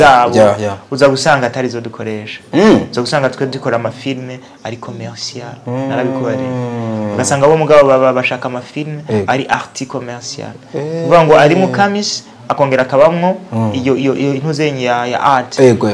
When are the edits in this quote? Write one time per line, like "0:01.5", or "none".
none